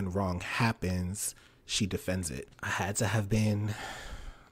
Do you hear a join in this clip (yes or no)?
yes